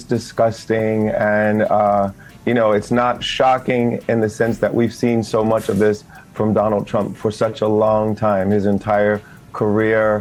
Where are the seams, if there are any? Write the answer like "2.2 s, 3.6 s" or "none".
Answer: none